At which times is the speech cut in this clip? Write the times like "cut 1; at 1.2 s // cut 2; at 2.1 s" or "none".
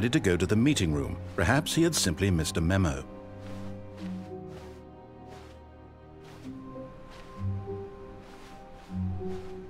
cut 1; at 3.0 s